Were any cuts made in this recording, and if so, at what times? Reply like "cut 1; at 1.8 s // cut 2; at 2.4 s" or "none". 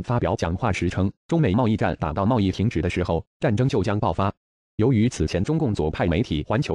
none